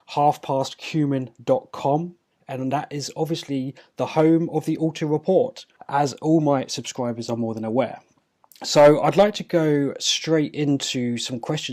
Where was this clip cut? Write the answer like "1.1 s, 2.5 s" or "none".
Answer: 1.3 s